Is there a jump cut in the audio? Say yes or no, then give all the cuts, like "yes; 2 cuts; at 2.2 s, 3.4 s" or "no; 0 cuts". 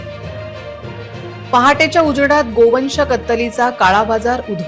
yes; 1 cut; at 1.5 s